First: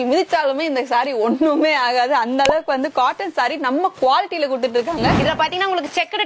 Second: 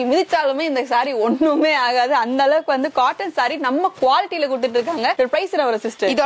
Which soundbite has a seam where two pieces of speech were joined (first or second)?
first